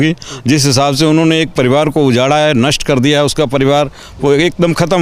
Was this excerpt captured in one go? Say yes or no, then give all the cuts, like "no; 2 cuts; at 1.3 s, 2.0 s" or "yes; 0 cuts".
yes; 0 cuts